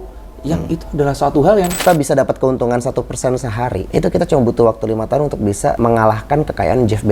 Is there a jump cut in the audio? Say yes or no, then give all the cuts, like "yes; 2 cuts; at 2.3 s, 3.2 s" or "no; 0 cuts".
yes; 3 cuts; at 1.8 s, 3.8 s, 5.8 s